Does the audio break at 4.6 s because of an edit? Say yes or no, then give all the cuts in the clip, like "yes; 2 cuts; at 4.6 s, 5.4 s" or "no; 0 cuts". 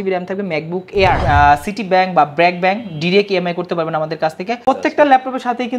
yes; 2 cuts; at 1.2 s, 4.6 s